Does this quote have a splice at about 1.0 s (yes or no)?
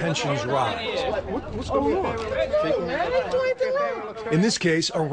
yes